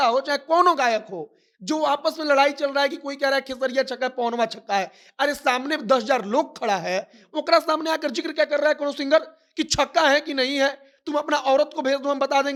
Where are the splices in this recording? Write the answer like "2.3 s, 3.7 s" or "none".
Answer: none